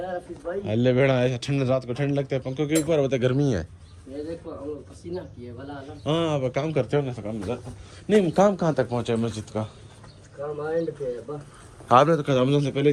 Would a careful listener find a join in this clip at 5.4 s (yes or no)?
no